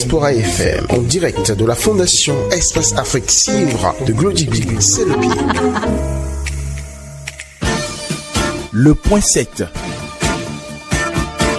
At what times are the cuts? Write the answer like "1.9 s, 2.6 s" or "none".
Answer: 7.5 s